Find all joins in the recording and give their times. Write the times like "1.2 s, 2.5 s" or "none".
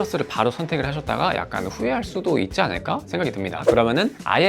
3.6 s